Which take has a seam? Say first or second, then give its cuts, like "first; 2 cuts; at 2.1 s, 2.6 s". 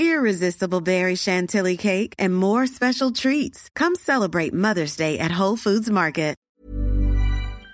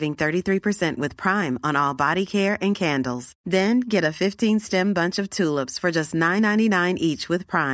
first; 1 cut; at 6.5 s